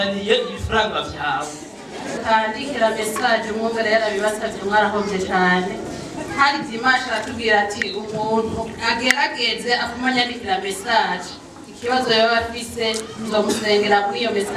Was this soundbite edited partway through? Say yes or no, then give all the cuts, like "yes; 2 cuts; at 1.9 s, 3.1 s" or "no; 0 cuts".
yes; 1 cut; at 2.2 s